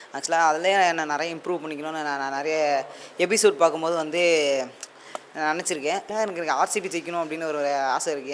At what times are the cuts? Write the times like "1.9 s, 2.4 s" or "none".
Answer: 6.1 s